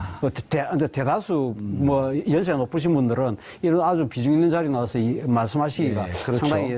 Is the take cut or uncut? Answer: cut